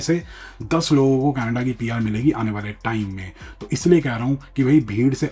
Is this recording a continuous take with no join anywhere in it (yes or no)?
yes